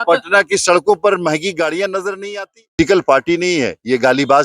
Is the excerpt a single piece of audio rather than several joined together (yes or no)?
no